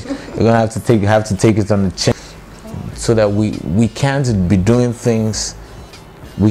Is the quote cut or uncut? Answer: cut